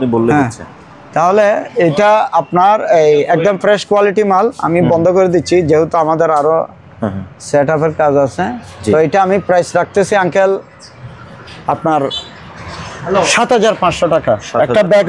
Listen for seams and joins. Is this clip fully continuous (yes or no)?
yes